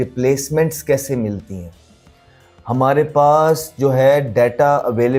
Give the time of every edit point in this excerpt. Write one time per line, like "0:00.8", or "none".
none

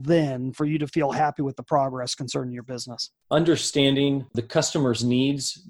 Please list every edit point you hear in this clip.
0:03.2
0:04.3

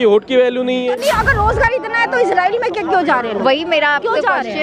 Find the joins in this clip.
0:01.0

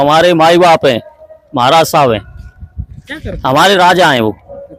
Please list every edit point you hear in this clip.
none

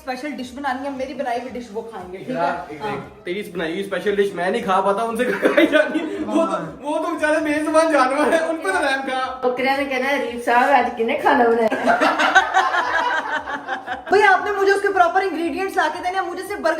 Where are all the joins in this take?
none

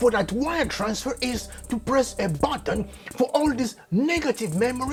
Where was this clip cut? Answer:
none

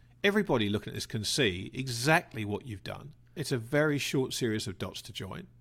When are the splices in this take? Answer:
0:03.4

